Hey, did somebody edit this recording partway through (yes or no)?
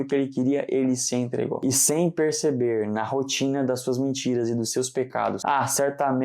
yes